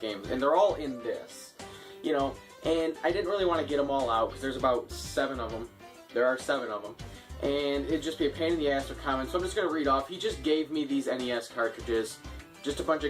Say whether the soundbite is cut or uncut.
cut